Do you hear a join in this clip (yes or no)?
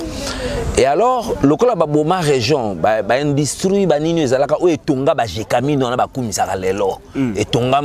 no